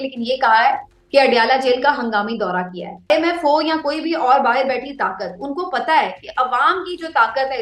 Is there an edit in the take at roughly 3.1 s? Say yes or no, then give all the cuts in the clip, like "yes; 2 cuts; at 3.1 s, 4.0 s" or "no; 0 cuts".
yes; 1 cut; at 3.1 s